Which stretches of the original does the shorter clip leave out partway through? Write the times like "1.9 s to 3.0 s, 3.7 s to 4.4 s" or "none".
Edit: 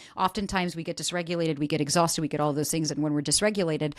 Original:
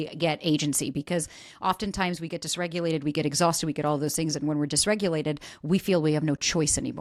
none